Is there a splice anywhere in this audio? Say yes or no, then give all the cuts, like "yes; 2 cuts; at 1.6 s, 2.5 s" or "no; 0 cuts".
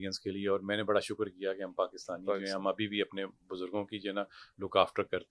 no; 0 cuts